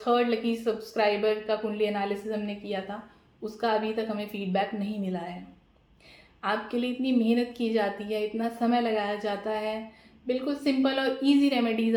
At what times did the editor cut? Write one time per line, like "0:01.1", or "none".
none